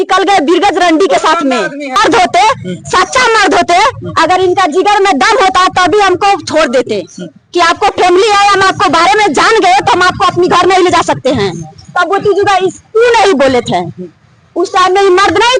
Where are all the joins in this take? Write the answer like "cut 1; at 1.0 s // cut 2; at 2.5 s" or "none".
cut 1; at 2.0 s